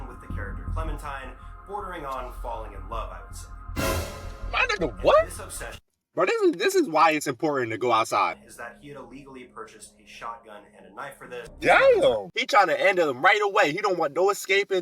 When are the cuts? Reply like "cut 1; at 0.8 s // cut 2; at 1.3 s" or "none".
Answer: cut 1; at 8.4 s // cut 2; at 11.5 s // cut 3; at 12.3 s